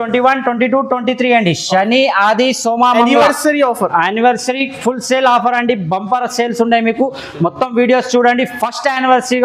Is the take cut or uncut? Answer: uncut